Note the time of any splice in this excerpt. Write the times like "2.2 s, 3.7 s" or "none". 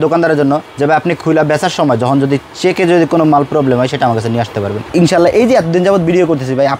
4.9 s